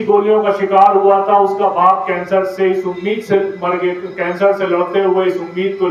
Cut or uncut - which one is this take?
uncut